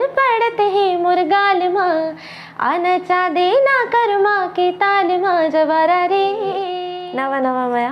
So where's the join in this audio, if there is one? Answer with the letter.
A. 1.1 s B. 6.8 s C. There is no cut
B